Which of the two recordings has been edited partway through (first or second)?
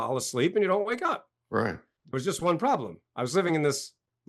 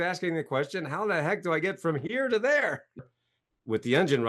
second